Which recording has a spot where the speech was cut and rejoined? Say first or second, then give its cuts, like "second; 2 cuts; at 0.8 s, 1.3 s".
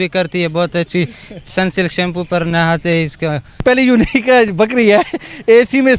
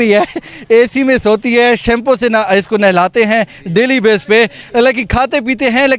first; 2 cuts; at 1.5 s, 3.6 s